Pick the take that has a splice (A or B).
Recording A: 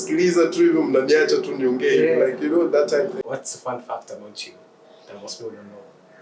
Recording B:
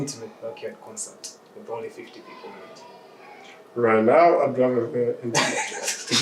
A